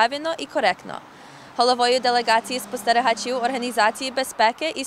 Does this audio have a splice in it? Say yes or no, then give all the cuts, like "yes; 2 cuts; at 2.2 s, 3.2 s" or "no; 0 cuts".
yes; 1 cut; at 1.1 s